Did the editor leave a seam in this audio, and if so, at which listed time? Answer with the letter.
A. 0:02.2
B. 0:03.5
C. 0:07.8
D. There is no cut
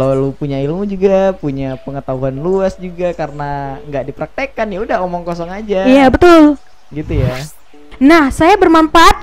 C